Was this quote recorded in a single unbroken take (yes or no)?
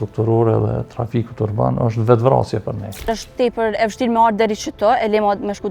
no